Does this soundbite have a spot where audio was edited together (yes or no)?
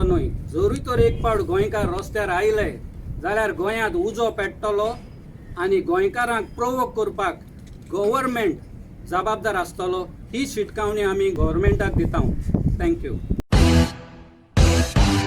no